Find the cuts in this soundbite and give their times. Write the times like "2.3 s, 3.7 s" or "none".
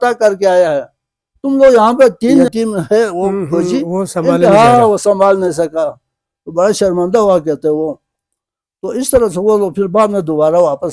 2.5 s